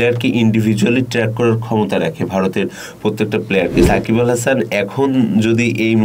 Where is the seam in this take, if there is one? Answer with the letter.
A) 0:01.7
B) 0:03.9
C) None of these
B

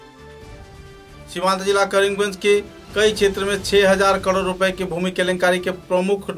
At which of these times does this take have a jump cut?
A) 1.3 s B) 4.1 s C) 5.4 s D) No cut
A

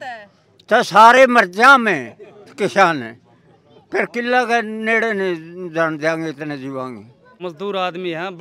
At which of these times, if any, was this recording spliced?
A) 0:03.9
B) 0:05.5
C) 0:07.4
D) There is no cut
C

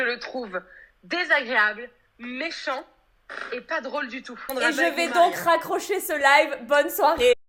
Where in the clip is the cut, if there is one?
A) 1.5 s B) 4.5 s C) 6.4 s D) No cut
B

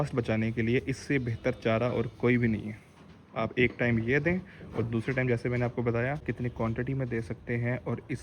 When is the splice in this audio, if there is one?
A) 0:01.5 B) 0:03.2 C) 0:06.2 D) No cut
C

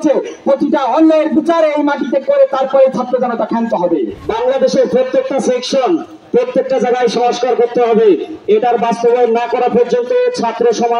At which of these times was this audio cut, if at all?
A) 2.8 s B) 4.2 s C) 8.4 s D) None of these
B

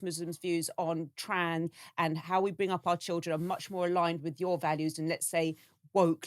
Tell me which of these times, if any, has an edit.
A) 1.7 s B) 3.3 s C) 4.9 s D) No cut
A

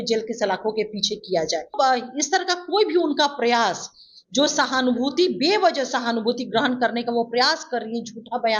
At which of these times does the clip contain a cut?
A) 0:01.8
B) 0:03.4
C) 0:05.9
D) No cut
A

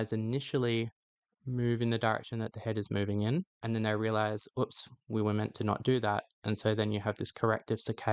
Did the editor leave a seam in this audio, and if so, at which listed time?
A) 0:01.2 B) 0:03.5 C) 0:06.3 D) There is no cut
B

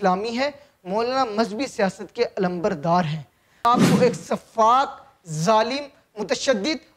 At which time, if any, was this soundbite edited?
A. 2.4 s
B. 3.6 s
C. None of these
B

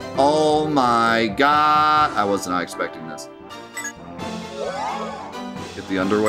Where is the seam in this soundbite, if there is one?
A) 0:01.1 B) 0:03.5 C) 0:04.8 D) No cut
B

